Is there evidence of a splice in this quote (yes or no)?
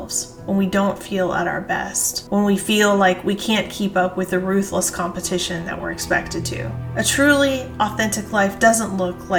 no